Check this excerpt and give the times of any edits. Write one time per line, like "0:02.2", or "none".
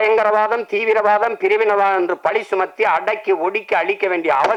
none